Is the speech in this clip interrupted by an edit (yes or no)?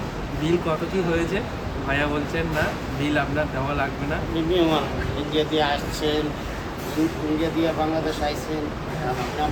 no